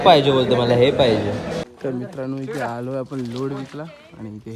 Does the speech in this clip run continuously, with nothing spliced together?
no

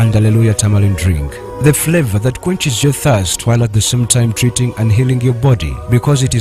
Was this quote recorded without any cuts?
yes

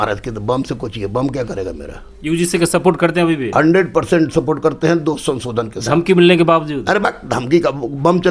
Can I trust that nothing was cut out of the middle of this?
yes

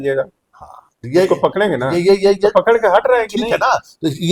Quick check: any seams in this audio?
no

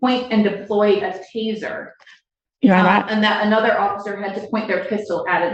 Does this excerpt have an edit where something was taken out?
no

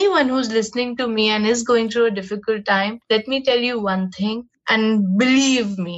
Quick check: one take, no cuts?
no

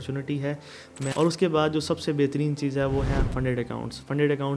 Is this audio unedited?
no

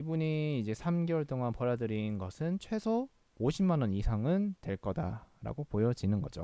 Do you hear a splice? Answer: no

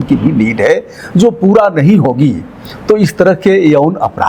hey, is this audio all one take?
yes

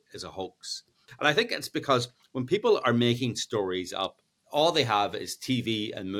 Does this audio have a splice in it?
yes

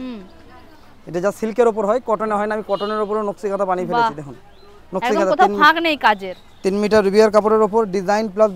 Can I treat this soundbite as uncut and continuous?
yes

